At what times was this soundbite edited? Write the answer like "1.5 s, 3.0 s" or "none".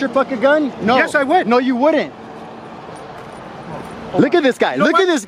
none